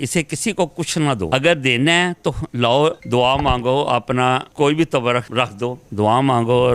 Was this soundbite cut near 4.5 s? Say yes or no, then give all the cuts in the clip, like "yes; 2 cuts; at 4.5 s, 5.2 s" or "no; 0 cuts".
no; 1 cut; at 1.3 s